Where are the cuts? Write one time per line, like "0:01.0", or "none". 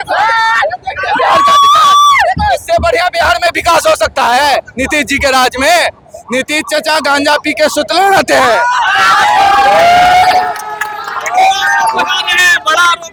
none